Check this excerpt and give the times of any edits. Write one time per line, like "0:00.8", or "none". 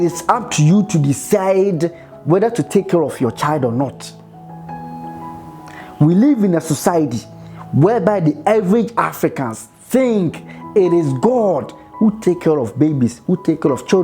0:04.1
0:05.4